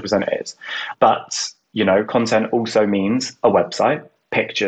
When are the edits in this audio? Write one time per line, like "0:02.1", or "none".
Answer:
0:00.8
0:02.1